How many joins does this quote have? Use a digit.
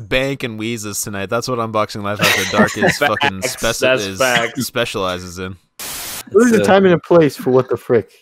1